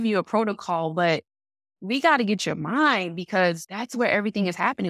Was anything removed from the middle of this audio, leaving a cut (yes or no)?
yes